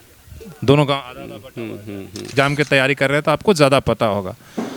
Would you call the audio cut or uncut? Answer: cut